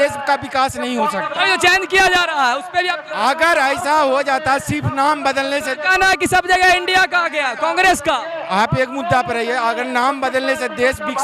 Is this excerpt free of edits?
yes; 0 cuts

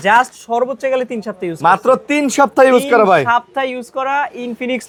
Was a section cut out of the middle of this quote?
no; 0 cuts

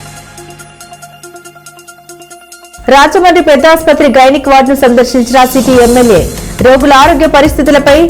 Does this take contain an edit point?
yes; 1 cut; at 1.8 s

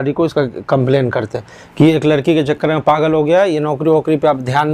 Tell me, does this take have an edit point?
no; 0 cuts

